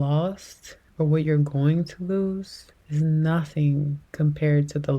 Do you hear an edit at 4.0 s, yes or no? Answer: yes